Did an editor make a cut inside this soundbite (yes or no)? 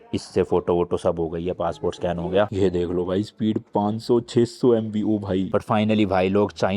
yes